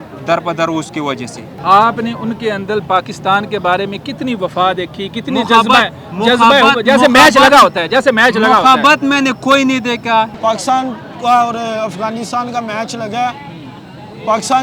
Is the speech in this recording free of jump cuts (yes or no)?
no